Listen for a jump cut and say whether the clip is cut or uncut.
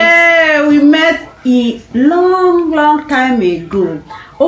uncut